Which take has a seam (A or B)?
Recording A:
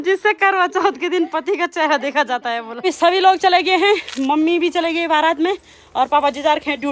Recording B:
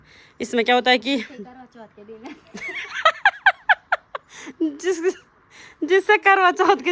A